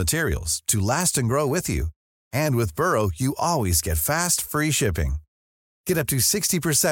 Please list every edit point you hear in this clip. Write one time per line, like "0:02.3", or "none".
none